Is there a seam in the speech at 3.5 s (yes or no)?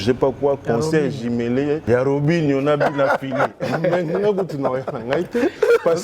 no